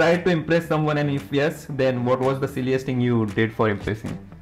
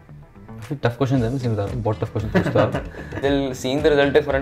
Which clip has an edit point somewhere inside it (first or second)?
second